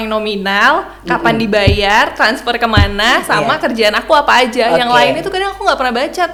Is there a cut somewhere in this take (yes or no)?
no